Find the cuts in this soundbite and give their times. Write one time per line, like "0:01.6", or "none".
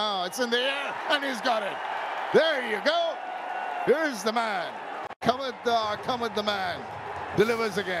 none